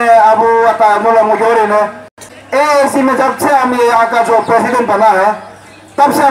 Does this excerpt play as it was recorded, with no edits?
no; 1 cut; at 2.2 s

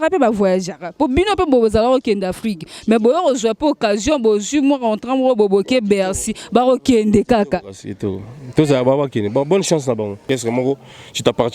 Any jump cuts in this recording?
yes; 1 cut; at 10.2 s

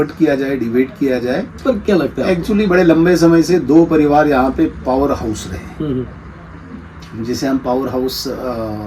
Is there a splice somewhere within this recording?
yes; 1 cut; at 1.6 s

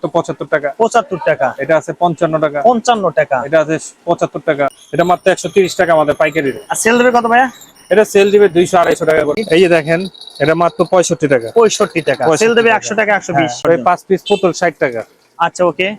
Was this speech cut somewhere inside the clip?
yes; 3 cuts; at 4.8 s, 9.3 s, 13.6 s

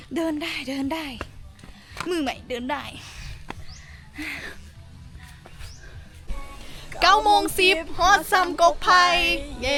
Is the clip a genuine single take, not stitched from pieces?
yes; 0 cuts

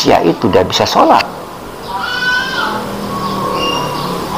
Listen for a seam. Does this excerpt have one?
no; 0 cuts

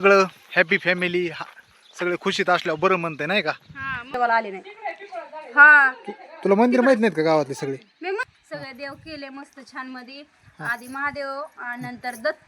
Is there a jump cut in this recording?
yes; 2 cuts; at 4.1 s, 8.3 s

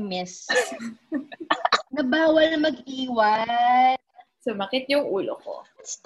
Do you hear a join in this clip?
yes; 1 cut; at 1.9 s

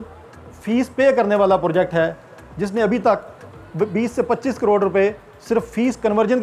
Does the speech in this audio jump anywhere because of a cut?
no; 0 cuts

